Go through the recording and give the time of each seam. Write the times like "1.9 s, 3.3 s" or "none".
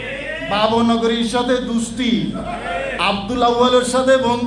2.8 s